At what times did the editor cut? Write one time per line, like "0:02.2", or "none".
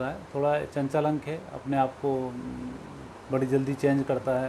none